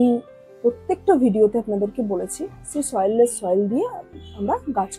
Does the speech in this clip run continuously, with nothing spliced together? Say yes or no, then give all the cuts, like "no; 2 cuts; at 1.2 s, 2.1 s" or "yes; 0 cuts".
yes; 0 cuts